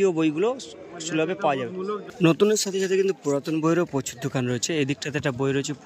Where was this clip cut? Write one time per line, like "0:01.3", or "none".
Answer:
0:02.1